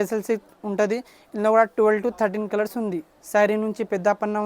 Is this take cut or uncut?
cut